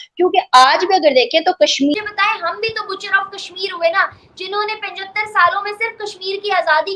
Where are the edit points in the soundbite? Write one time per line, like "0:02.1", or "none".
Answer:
0:01.9